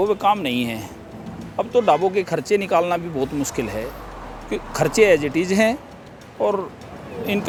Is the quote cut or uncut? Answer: uncut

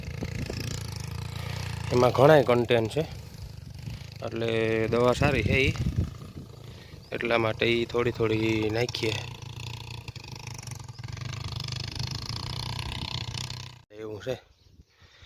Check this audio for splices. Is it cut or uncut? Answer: cut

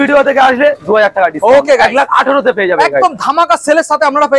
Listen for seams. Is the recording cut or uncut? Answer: uncut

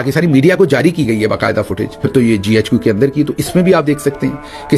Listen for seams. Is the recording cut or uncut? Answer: cut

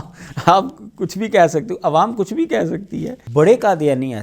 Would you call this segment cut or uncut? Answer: cut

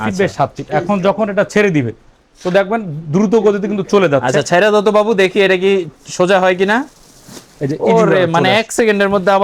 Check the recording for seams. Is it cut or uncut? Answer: uncut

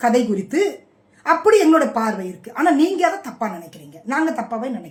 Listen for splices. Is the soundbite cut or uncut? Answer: uncut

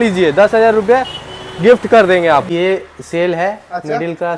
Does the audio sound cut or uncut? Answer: cut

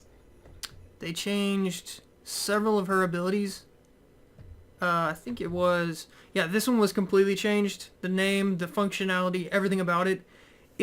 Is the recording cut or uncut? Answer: cut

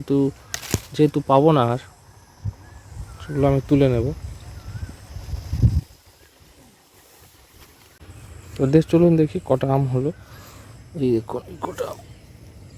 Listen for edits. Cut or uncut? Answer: cut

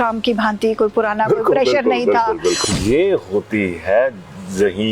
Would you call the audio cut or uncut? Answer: cut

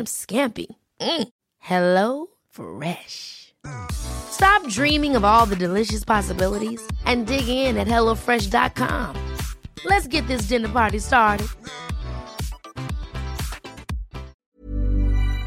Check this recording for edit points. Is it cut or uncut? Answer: cut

